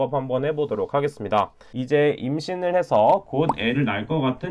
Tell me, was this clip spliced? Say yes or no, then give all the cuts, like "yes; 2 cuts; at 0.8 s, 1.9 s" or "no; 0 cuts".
yes; 1 cut; at 1.6 s